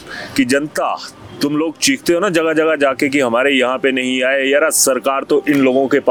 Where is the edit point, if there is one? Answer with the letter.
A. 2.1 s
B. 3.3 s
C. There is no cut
C